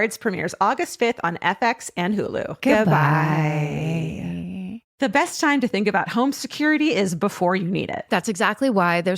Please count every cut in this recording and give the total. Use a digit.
1